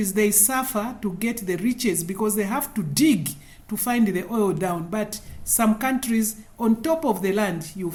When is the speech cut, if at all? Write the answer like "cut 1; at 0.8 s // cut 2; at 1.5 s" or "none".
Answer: none